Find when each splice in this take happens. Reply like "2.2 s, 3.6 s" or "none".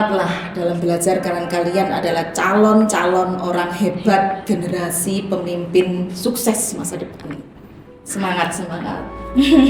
none